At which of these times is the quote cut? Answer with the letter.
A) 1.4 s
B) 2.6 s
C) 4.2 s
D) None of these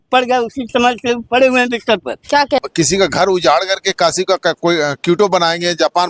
B